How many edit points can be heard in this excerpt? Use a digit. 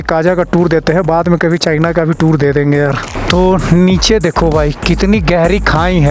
1